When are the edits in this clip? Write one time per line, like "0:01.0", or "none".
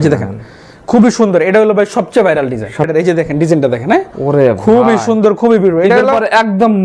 0:02.9